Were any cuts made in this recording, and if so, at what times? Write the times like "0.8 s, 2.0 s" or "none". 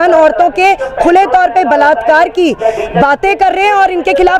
none